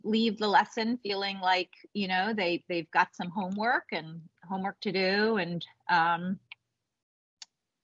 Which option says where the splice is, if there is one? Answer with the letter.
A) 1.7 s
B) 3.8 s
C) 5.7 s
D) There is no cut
D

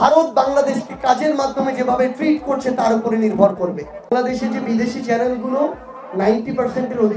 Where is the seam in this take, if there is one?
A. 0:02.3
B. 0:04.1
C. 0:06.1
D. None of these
B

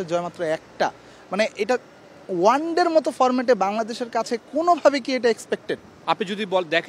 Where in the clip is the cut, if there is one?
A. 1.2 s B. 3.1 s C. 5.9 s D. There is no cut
C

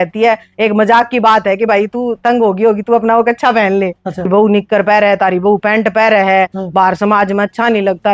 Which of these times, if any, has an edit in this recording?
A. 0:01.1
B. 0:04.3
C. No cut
B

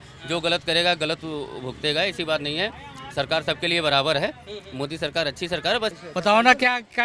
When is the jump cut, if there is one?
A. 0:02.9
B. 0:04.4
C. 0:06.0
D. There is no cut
C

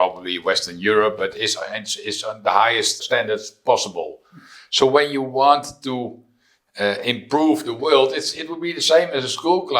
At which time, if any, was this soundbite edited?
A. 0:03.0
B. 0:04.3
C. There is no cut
A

